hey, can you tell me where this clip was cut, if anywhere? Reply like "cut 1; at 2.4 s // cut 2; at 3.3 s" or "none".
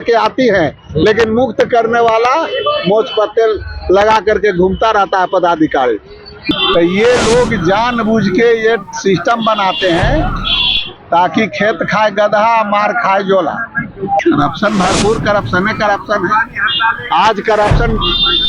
cut 1; at 6.5 s // cut 2; at 14.2 s